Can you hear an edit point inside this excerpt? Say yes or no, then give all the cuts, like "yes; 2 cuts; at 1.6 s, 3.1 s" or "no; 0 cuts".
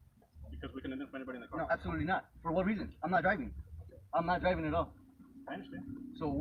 no; 0 cuts